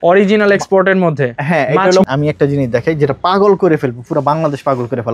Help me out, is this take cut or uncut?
cut